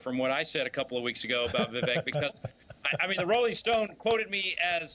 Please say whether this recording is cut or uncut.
cut